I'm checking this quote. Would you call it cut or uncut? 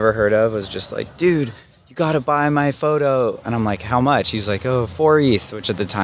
uncut